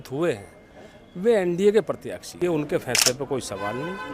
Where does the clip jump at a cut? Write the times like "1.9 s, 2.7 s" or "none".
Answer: 2.3 s